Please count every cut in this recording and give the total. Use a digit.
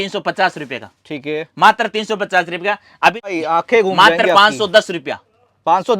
1